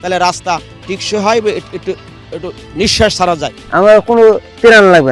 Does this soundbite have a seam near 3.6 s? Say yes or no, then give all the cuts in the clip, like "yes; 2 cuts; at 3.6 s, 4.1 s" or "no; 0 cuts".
yes; 1 cut; at 3.6 s